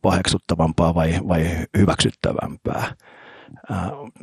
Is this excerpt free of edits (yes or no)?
yes